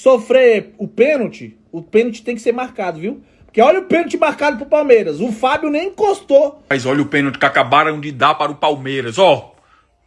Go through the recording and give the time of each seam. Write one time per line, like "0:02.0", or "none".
0:06.7